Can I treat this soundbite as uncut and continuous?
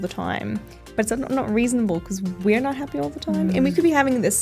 yes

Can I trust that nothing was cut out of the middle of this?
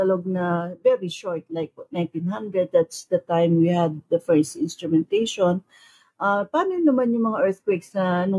yes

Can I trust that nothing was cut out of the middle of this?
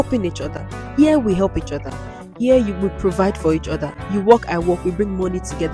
yes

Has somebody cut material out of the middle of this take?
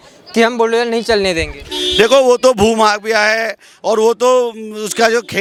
no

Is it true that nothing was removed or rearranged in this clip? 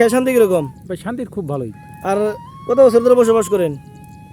yes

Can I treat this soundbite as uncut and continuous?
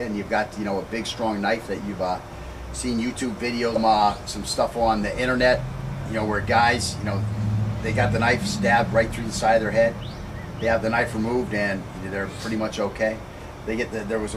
yes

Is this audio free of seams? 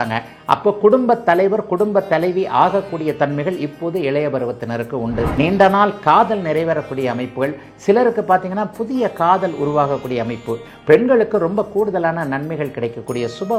no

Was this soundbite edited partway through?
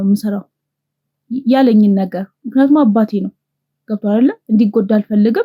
no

